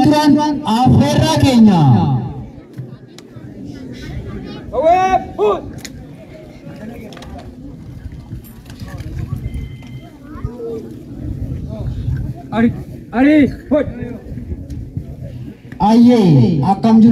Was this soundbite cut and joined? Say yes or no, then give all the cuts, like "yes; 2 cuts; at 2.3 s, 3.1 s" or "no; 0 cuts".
yes; 1 cut; at 15.5 s